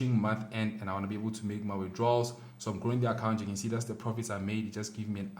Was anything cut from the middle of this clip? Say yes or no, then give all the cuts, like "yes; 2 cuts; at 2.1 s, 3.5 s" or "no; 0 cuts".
no; 0 cuts